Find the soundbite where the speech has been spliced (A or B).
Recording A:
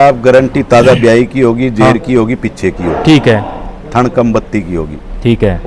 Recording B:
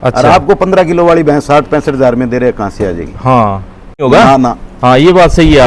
B